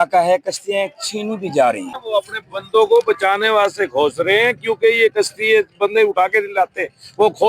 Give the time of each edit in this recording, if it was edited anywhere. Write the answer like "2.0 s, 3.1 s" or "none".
1.9 s